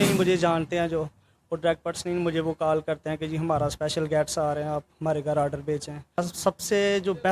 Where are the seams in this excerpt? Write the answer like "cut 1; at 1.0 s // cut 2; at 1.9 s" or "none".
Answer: cut 1; at 6.2 s